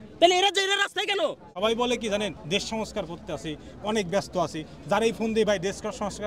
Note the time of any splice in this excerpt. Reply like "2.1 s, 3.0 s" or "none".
1.6 s